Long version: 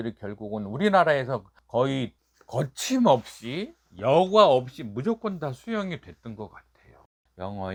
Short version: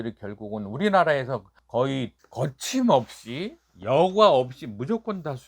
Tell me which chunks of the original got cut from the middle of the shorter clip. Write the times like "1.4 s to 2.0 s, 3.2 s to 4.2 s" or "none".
2.2 s to 2.4 s